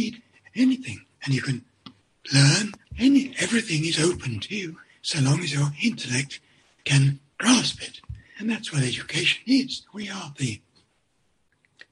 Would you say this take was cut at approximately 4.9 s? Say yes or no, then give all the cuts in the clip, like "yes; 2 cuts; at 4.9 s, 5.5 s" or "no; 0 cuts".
no; 1 cut; at 2.8 s